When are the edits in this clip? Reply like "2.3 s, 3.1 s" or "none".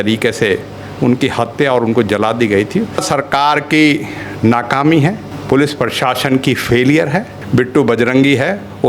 3.0 s, 5.3 s, 7.3 s